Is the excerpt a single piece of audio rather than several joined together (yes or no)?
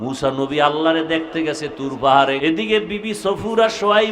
no